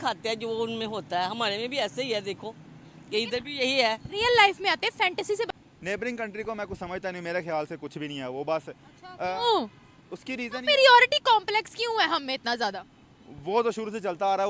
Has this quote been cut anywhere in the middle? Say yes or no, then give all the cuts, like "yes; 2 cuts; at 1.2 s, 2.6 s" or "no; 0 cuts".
yes; 1 cut; at 5.5 s